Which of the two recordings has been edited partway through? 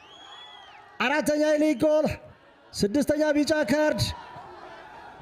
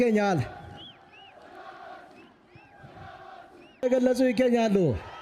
second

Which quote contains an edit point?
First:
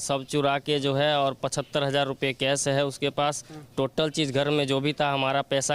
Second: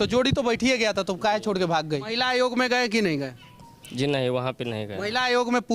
second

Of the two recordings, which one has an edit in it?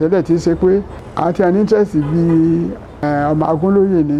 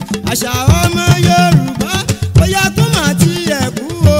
first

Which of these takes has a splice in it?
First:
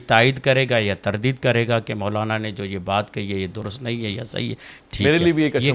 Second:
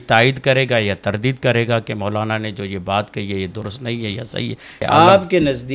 second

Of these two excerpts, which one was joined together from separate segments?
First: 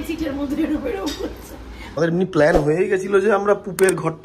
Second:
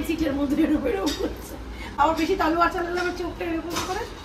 first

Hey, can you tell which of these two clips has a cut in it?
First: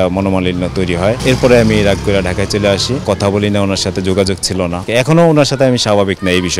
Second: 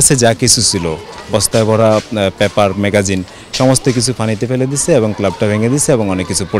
first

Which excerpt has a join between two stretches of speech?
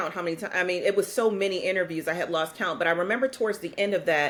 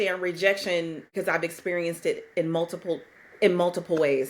second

